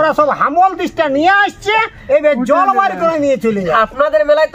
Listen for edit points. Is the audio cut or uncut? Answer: cut